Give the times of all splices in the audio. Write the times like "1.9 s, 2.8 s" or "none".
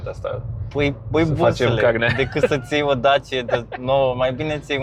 none